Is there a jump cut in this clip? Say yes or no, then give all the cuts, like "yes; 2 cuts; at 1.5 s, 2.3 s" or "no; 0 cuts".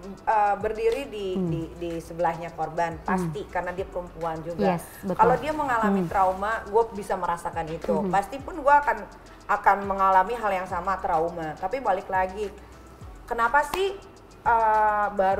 no; 0 cuts